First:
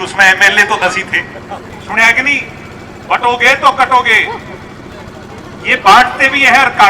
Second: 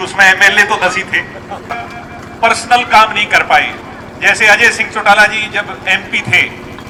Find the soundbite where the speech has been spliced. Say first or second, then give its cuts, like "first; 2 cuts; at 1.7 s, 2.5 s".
first; 1 cut; at 1.7 s